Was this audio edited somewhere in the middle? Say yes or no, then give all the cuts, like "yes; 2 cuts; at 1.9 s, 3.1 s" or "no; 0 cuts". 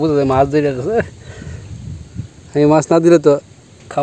no; 0 cuts